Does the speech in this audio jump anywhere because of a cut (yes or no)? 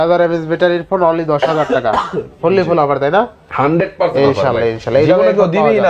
no